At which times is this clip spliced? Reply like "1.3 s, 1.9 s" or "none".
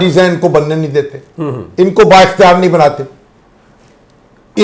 none